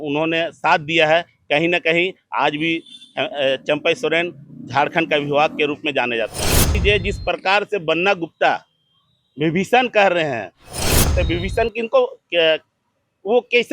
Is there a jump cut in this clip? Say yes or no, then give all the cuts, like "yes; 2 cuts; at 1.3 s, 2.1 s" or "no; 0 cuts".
yes; 2 cuts; at 6.8 s, 11.1 s